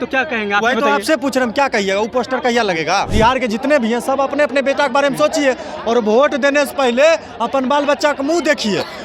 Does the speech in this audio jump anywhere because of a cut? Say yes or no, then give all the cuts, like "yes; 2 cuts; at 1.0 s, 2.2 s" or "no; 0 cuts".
yes; 1 cut; at 3.1 s